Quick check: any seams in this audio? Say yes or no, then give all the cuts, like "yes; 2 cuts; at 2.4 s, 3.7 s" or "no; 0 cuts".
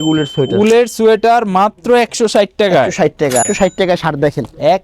yes; 1 cut; at 3.5 s